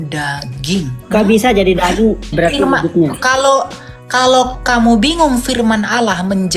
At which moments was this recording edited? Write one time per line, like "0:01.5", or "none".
0:01.0
0:02.3

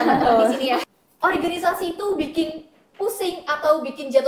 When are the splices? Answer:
0:01.0

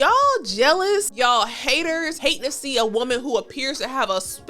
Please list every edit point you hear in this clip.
0:01.1
0:02.1

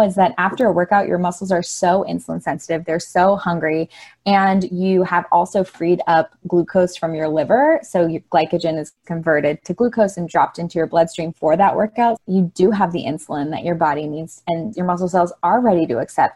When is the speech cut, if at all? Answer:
0:12.2
0:14.7

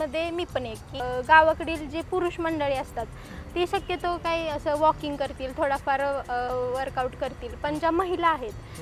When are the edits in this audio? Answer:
0:00.9

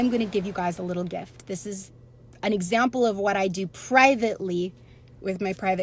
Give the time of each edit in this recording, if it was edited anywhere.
none

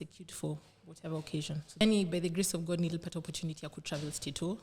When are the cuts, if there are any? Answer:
0:01.8

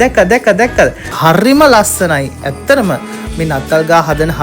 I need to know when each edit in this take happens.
0:01.1

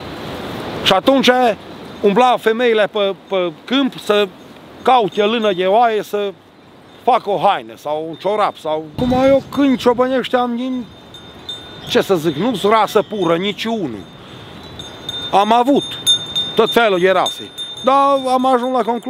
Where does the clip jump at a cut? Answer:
0:08.9

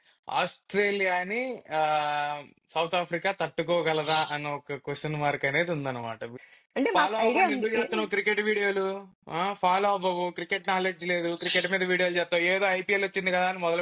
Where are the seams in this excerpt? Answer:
0:06.2

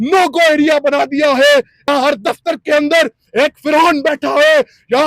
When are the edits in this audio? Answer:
0:01.9

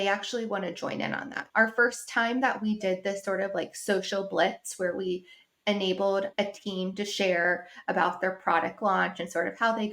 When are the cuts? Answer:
0:01.4

